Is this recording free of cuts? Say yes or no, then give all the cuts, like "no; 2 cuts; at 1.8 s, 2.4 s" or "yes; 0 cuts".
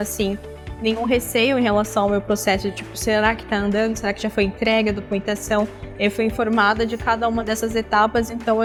yes; 0 cuts